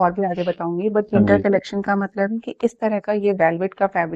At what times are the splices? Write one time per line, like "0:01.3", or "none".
none